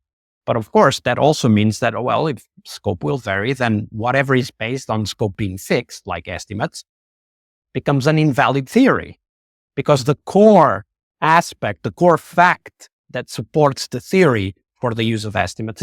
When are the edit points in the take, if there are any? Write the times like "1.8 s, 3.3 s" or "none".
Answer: none

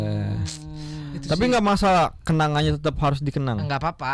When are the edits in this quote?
none

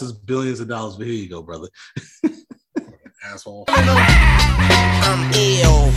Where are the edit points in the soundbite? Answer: 3.6 s

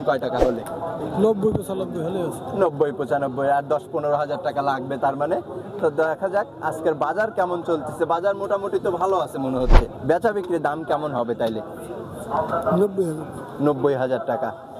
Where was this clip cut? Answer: 10.0 s

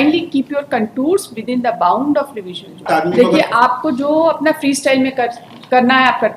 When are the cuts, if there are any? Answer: 2.9 s

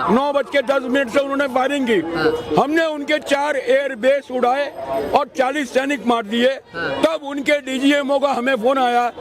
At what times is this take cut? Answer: none

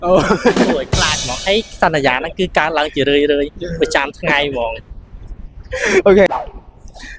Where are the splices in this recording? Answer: 6.3 s

